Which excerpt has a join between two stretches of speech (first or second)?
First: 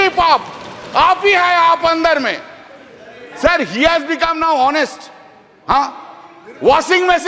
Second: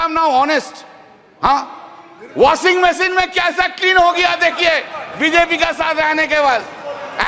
first